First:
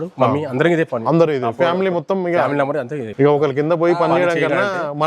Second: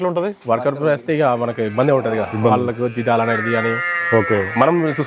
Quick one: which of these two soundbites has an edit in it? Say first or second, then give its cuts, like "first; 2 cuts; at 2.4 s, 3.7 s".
first; 1 cut; at 3.0 s